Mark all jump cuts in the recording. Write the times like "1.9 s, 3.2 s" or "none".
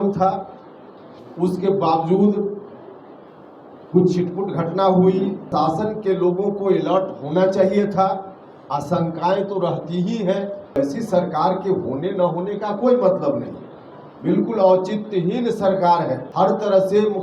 5.5 s, 10.8 s, 16.3 s